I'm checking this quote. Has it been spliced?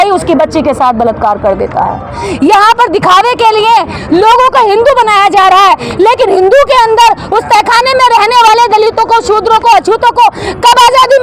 no; 0 cuts

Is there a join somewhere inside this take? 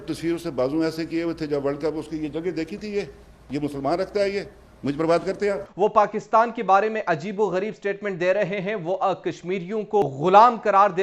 yes; 2 cuts; at 5.6 s, 10.0 s

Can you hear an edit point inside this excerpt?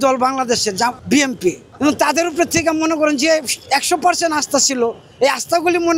no; 0 cuts

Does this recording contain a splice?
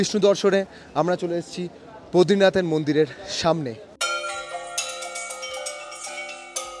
no; 0 cuts

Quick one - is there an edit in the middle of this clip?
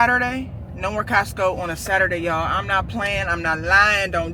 no; 0 cuts

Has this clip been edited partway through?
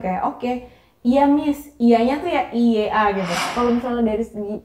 yes; 1 cut; at 3.5 s

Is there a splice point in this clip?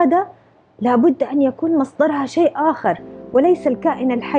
no; 0 cuts

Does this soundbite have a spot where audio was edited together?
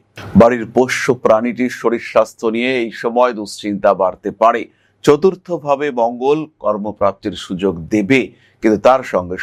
no; 0 cuts

